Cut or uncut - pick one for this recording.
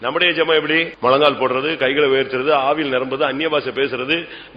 cut